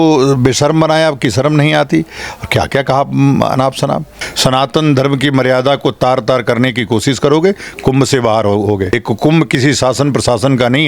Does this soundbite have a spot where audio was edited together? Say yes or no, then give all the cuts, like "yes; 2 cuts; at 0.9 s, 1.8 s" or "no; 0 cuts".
yes; 2 cuts; at 4.2 s, 9.0 s